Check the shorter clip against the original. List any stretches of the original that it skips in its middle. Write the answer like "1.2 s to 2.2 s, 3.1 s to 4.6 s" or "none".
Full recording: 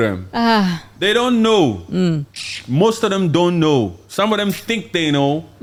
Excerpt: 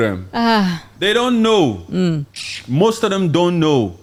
none